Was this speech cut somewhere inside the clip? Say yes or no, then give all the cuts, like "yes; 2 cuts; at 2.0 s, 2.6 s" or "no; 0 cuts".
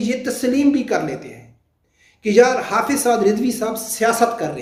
no; 0 cuts